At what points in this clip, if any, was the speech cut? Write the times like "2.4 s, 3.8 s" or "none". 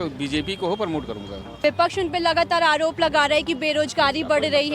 1.6 s